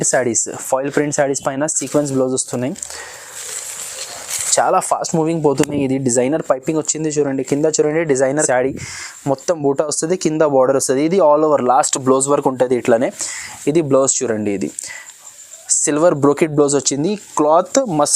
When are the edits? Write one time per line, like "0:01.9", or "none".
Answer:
0:08.4